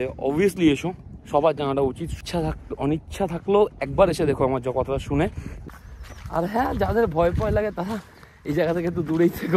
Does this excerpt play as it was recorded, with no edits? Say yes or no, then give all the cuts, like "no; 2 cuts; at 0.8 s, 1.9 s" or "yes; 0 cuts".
no; 2 cuts; at 2.2 s, 5.7 s